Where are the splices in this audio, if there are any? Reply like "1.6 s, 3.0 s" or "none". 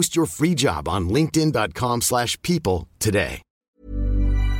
3.6 s